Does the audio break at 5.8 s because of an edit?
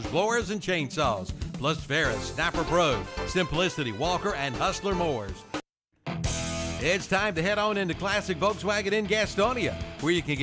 yes; 1 cut; at 5.8 s

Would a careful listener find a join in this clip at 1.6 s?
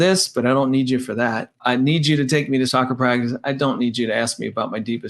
yes; 2 cuts; at 1.6 s, 2.7 s

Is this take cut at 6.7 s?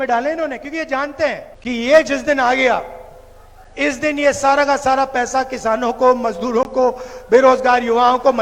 no; 1 cut; at 1.5 s

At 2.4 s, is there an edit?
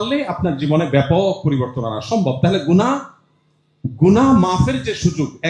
no; 0 cuts

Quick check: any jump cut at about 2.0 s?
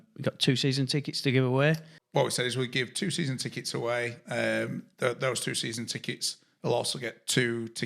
yes; 1 cut; at 2.0 s

